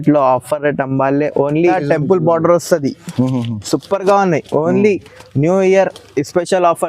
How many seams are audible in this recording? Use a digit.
1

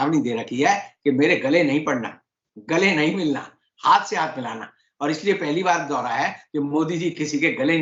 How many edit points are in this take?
0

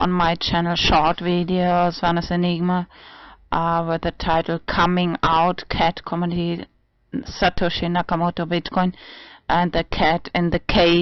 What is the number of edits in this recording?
0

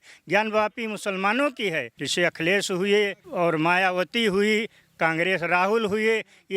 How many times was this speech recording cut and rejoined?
2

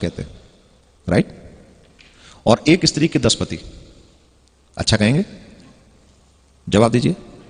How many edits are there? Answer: 0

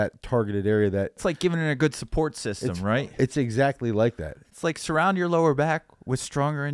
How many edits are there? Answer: 2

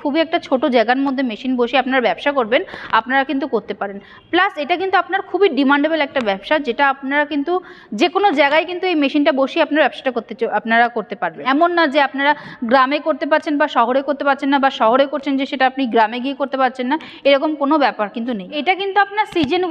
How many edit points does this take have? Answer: 2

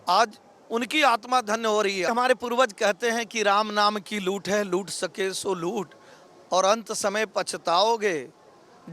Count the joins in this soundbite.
1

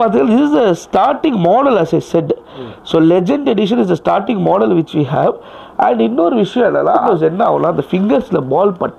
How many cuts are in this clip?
1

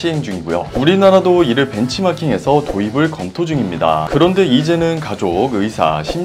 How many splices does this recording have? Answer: 1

